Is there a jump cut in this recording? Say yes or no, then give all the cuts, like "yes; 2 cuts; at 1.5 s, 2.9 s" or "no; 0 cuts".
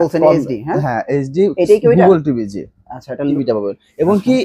yes; 1 cut; at 3.3 s